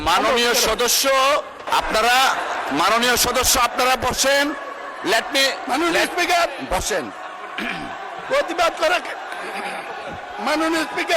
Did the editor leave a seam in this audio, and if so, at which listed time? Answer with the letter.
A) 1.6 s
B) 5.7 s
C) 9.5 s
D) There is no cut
A